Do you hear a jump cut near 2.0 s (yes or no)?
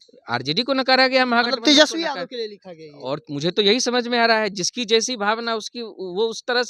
no